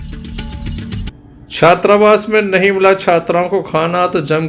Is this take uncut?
no; 1 cut; at 1.1 s

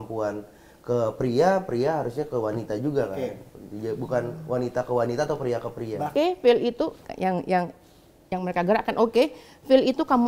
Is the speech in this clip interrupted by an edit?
yes; 1 cut; at 6.1 s

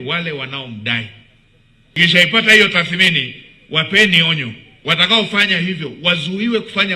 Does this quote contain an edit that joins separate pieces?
yes; 1 cut; at 2.0 s

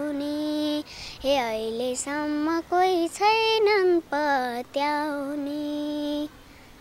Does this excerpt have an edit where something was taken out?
no; 0 cuts

